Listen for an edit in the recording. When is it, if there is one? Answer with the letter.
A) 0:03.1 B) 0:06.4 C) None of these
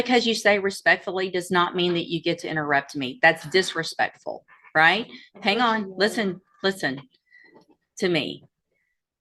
C